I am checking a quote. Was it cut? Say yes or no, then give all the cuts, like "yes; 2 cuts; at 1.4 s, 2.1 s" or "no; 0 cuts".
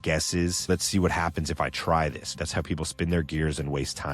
yes; 2 cuts; at 0.7 s, 2.4 s